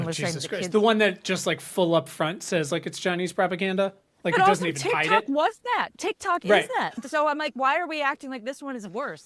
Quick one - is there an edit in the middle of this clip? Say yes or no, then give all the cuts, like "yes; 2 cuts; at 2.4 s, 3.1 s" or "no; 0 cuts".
no; 0 cuts